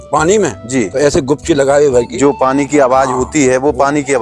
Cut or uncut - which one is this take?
uncut